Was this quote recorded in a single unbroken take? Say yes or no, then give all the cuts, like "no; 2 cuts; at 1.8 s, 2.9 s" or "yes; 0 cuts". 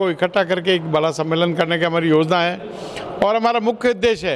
yes; 0 cuts